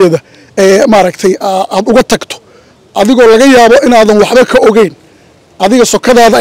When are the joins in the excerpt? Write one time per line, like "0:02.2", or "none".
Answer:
none